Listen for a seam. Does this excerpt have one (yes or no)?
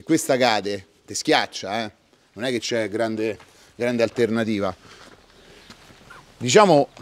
no